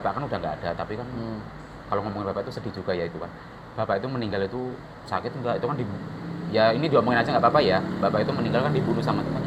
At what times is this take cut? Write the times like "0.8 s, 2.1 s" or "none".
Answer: none